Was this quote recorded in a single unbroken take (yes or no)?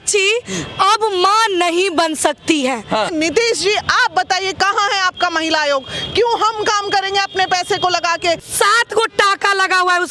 no